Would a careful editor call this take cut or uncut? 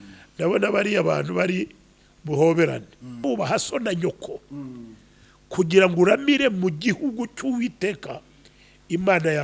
cut